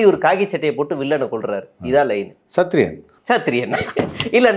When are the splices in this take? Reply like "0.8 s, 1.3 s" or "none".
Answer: none